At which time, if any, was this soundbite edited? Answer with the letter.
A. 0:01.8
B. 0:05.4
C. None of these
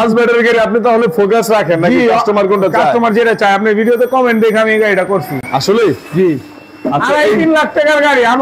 C